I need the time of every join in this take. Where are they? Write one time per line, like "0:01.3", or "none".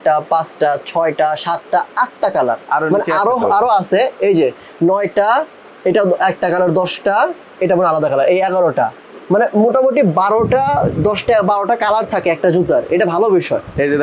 none